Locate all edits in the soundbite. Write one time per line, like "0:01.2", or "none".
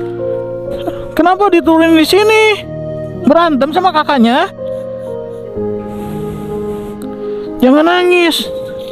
none